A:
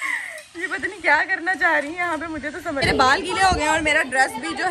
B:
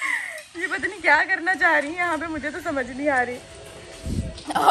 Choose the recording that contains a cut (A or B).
A